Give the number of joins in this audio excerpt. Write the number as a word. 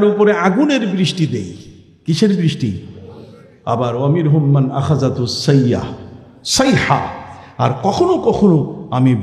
zero